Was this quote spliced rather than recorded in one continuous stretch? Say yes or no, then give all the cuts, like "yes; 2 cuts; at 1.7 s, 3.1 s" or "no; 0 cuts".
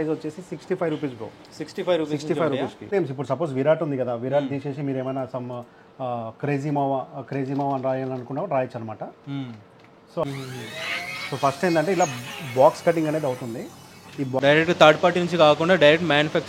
yes; 3 cuts; at 2.9 s, 10.2 s, 14.4 s